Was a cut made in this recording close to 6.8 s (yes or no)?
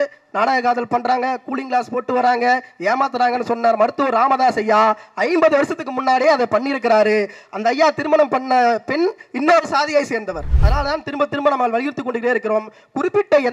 no